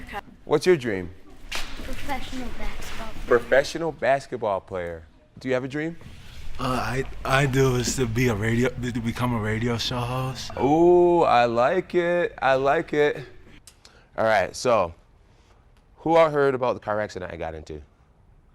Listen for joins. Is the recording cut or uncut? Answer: cut